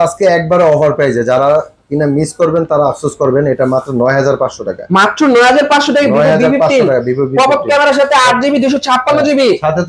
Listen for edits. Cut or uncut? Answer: uncut